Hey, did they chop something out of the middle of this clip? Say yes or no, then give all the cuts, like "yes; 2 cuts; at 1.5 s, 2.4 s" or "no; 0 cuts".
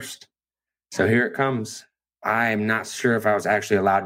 yes; 1 cut; at 1.8 s